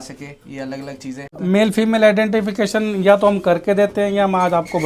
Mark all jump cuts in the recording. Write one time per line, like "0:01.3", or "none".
0:01.3